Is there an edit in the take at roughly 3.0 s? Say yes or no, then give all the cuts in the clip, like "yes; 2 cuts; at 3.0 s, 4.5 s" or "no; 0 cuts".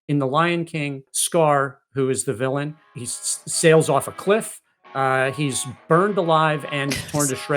yes; 2 cuts; at 1.1 s, 3.0 s